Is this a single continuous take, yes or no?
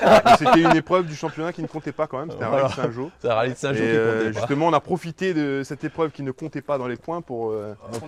yes